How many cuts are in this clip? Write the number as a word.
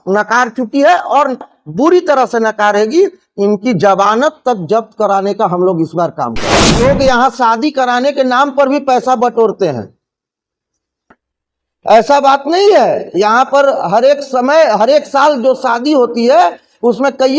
one